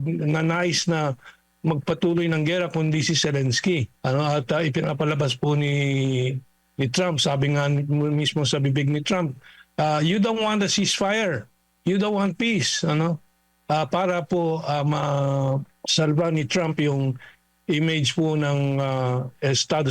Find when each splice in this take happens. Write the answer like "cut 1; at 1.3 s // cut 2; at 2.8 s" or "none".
cut 1; at 3.9 s // cut 2; at 15.7 s